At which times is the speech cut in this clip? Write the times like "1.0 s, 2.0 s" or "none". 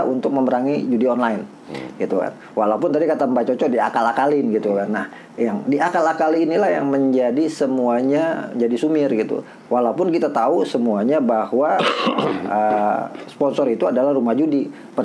none